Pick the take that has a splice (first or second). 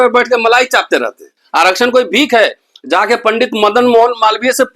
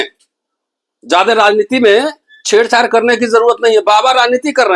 first